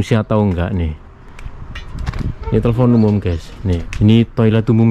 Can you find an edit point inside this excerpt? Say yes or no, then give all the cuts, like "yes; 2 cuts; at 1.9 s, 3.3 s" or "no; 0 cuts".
yes; 1 cut; at 3.9 s